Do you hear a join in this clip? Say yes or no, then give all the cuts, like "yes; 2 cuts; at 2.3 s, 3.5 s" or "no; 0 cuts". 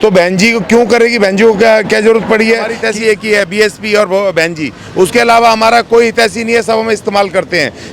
yes; 1 cut; at 2.8 s